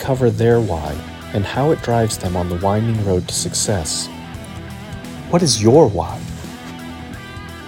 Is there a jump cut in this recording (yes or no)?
no